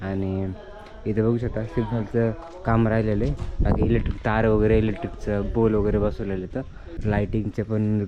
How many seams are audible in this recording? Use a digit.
1